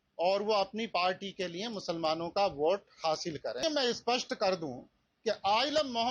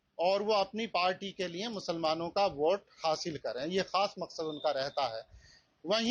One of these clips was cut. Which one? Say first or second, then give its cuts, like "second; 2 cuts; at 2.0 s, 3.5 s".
first; 1 cut; at 3.6 s